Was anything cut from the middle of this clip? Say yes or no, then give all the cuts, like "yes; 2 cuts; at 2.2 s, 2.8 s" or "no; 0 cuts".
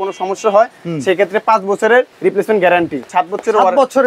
yes; 2 cuts; at 2.1 s, 3.0 s